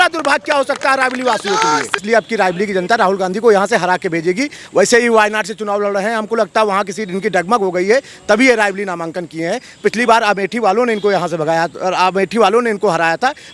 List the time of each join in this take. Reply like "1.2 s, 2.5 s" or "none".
2.0 s